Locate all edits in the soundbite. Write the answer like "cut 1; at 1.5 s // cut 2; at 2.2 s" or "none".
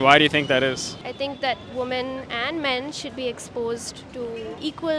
cut 1; at 1.0 s